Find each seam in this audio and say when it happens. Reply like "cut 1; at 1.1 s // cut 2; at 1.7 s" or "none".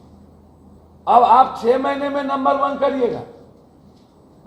none